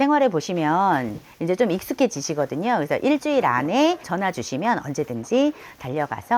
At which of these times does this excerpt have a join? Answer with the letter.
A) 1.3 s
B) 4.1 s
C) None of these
B